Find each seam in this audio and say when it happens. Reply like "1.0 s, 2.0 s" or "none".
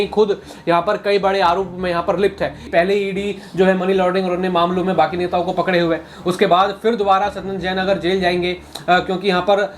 2.6 s